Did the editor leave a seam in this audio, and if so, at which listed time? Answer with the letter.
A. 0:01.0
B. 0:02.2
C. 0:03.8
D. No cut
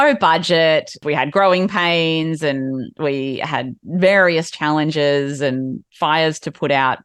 A